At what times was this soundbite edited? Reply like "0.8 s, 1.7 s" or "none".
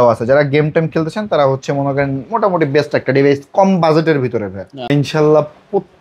4.9 s